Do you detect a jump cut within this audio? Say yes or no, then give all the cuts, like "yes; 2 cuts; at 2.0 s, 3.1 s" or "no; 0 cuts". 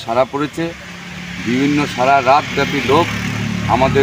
no; 0 cuts